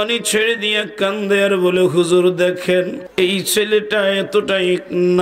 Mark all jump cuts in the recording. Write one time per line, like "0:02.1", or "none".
0:03.0